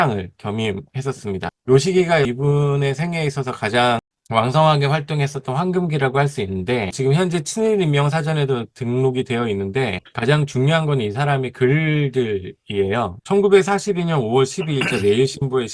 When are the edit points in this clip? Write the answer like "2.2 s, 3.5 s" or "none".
1.5 s, 2.3 s, 4.1 s, 6.9 s, 13.2 s

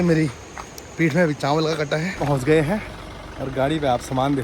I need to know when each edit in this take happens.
2.2 s

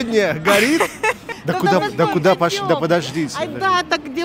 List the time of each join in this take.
1.3 s

